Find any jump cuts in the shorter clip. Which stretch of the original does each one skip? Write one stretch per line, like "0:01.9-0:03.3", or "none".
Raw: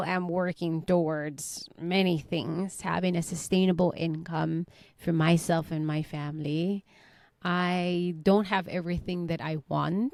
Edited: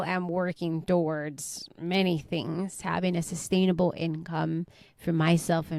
none